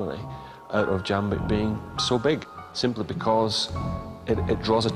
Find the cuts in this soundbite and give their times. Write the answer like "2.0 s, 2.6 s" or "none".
2.6 s